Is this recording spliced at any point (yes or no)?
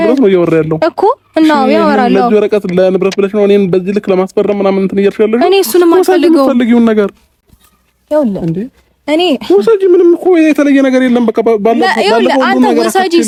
no